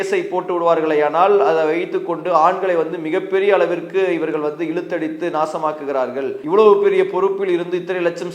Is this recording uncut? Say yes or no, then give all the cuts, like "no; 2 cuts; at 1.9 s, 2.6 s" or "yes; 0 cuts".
no; 1 cut; at 6.4 s